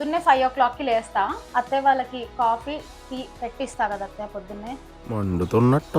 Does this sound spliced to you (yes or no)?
yes